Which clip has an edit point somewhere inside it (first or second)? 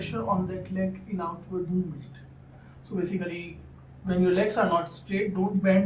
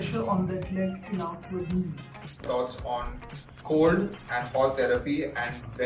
second